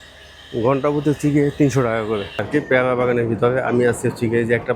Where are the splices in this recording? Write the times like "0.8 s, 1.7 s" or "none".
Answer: 2.4 s